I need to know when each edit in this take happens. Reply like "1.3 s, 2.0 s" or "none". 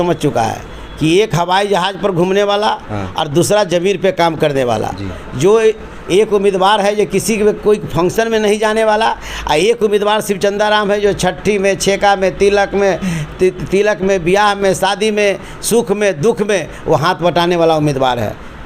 none